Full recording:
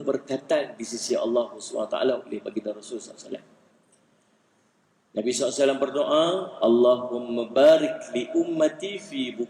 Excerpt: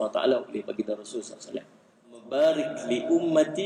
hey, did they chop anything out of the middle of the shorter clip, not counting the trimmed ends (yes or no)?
yes